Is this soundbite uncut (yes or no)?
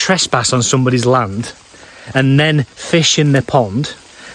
yes